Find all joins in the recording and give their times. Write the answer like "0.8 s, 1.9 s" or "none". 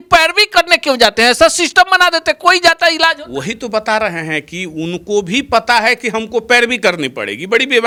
none